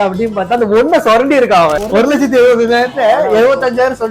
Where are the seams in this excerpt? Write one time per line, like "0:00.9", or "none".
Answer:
0:01.8